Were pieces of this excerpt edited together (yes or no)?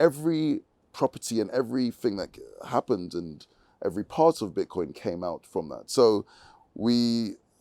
no